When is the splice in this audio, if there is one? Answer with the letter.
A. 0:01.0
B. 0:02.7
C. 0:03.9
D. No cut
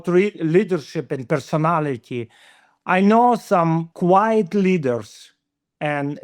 C